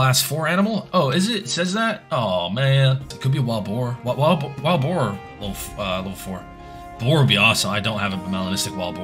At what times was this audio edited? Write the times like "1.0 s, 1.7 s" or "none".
3.1 s